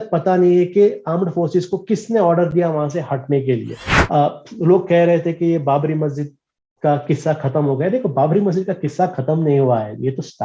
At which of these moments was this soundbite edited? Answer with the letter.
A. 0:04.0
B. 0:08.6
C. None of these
A